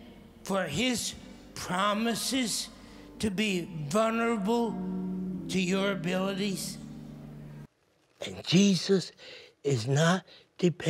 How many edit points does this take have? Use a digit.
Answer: 1